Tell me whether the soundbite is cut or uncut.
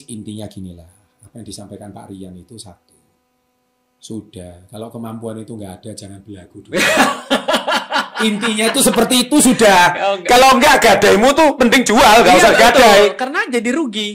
uncut